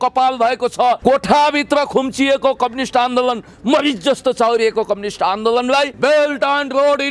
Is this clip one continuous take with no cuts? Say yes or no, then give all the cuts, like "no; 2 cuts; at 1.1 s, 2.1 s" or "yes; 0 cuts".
no; 2 cuts; at 1.0 s, 5.9 s